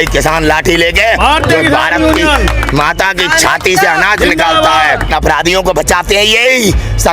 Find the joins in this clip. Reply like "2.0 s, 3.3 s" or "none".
5.1 s